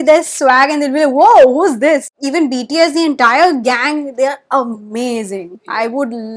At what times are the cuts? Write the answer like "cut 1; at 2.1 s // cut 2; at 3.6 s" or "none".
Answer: cut 1; at 2.2 s